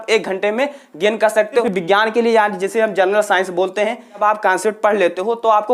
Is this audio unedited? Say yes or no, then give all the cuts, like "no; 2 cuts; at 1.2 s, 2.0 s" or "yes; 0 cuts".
no; 2 cuts; at 1.6 s, 4.2 s